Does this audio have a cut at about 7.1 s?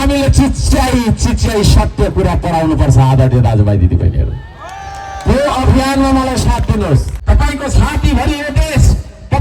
yes; 1 cut; at 7.1 s

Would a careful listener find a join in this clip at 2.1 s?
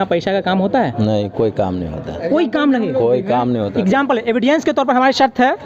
no; 0 cuts

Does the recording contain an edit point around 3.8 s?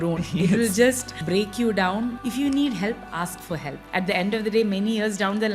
yes; 3 cuts; at 1.1 s, 2.2 s, 3.8 s

